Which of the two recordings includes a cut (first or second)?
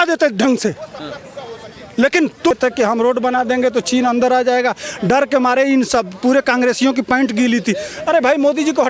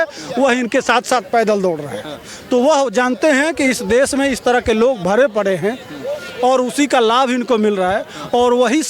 first